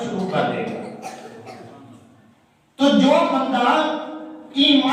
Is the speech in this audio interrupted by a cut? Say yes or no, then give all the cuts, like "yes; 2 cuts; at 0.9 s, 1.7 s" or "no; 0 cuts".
no; 0 cuts